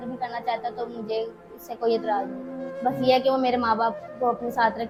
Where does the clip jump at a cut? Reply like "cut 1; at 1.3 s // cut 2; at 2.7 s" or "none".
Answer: none